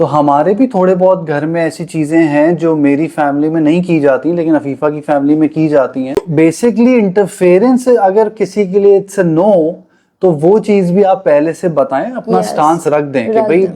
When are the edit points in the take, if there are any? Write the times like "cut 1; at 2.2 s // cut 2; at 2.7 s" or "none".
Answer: cut 1; at 6.3 s